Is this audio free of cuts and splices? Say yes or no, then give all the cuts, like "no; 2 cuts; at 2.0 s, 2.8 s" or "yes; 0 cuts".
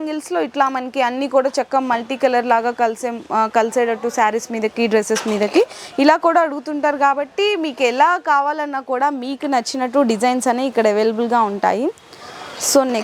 yes; 0 cuts